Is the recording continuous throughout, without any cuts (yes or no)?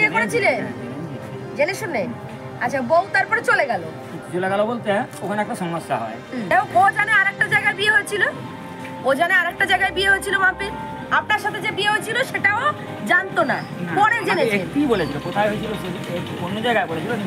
no